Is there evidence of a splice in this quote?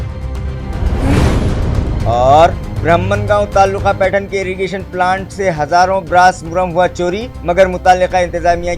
yes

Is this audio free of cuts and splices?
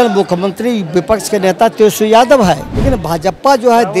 no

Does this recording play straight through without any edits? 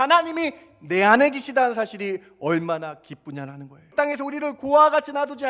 no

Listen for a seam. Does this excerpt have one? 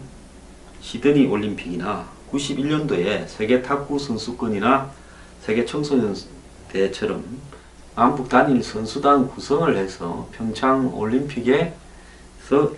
yes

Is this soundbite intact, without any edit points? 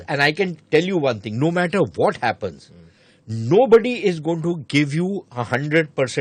yes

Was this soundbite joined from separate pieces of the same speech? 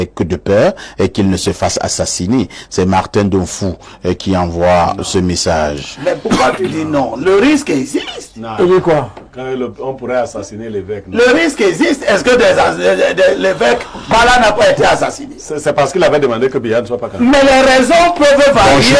no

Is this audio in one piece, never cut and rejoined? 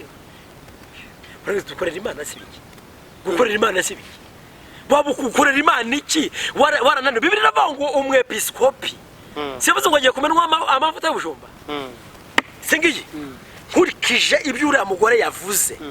no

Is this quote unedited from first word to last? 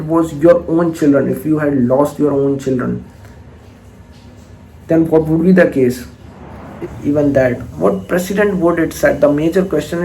no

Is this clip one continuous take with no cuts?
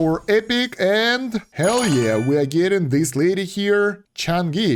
yes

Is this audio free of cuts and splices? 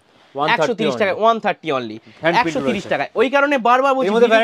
yes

